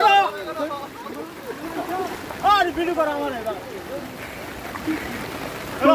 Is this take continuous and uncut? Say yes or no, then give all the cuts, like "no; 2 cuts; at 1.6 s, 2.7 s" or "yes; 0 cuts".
no; 1 cut; at 2.2 s